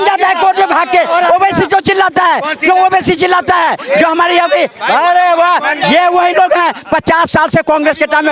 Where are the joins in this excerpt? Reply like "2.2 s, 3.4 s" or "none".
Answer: none